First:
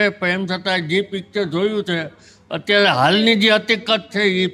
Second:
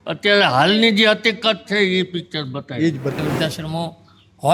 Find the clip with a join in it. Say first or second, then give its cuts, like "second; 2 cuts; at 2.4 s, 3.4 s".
second; 1 cut; at 3.1 s